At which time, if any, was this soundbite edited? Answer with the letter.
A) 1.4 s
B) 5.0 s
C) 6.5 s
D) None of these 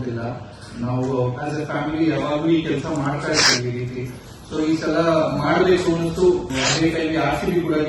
C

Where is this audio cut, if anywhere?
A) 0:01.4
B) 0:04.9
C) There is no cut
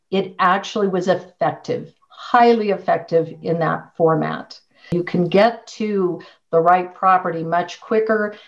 B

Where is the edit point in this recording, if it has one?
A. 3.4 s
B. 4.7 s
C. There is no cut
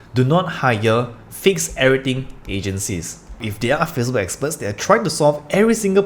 A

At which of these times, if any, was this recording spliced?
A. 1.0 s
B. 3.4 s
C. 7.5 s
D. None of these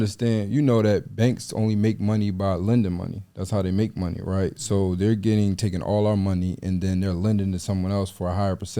D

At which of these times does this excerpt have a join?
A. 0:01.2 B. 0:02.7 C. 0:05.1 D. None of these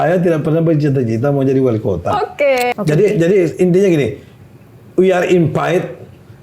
B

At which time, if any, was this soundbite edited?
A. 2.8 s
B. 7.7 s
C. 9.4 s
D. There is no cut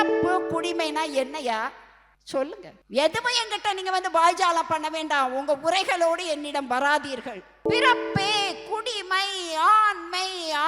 B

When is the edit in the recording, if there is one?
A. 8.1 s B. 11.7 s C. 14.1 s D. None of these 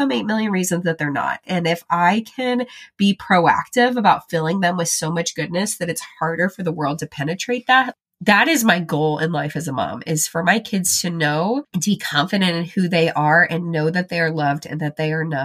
B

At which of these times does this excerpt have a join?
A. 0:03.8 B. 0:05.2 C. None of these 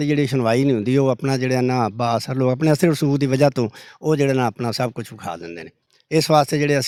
C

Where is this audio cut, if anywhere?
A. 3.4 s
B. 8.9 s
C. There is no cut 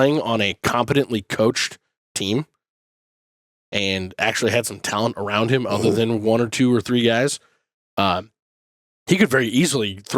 A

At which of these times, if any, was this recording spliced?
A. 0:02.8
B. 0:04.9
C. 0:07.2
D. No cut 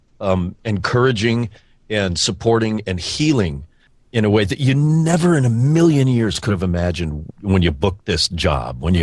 C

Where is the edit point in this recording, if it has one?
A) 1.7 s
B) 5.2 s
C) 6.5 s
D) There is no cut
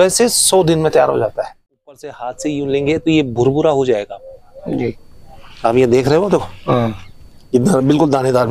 A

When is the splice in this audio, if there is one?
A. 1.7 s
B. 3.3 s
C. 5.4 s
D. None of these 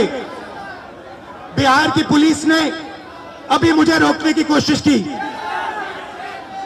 D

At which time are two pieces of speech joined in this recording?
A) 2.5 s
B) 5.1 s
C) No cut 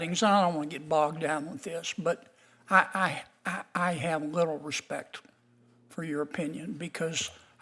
C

